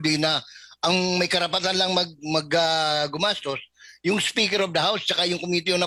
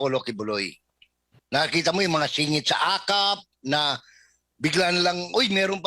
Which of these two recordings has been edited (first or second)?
second